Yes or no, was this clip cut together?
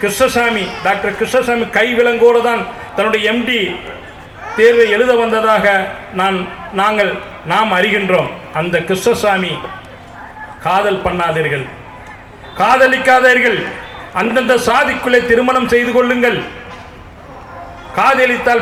no